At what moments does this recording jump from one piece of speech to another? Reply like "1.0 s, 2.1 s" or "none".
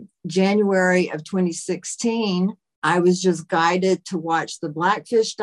2.7 s